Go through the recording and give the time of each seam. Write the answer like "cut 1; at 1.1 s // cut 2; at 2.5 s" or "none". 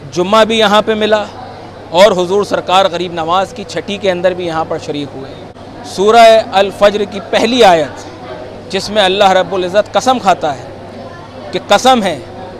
cut 1; at 5.5 s